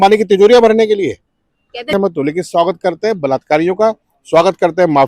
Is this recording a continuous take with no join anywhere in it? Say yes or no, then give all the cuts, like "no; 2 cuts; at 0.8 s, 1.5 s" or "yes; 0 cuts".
no; 1 cut; at 1.9 s